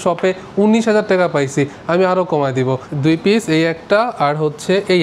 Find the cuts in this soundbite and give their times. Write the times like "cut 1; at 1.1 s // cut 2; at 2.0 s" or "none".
cut 1; at 2.9 s